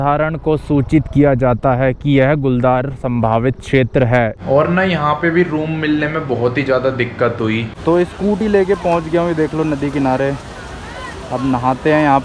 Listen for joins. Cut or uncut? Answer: cut